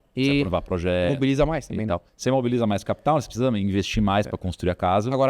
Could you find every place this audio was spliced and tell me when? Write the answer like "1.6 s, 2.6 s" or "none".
2.1 s